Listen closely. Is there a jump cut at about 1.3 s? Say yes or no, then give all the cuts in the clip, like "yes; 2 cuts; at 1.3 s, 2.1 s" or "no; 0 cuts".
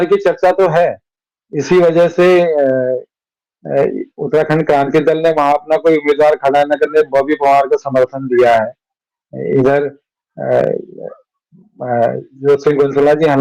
no; 0 cuts